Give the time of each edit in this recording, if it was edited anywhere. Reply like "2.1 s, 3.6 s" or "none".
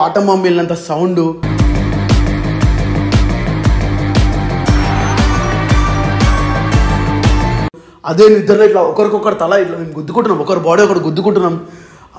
none